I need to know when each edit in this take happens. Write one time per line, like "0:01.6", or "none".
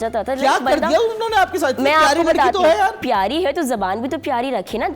0:03.0